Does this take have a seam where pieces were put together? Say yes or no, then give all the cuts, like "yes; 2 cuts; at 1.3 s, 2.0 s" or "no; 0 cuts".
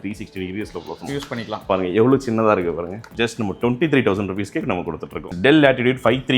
yes; 2 cuts; at 3.1 s, 5.3 s